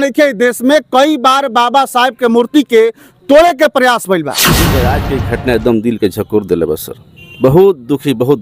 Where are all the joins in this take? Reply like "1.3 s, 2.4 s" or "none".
4.7 s